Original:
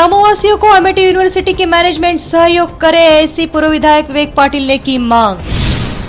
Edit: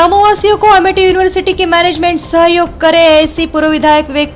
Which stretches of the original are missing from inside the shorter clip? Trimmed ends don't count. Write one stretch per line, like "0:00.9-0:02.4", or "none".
none